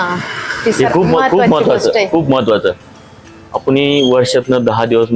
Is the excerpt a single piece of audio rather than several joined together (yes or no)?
yes